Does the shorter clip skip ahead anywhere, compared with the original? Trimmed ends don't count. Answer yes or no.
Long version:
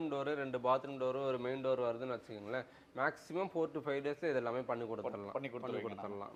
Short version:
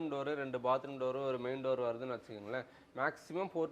no